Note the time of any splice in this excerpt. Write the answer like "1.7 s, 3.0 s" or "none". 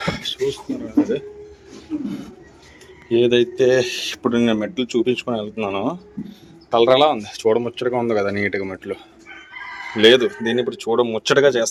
none